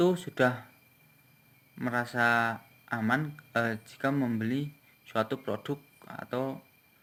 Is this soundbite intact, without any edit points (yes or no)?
yes